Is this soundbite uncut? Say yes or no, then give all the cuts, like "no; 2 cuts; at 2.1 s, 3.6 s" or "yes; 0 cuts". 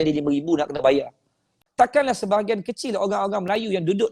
no; 1 cut; at 1.5 s